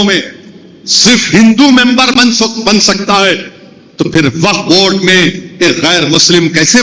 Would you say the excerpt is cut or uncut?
uncut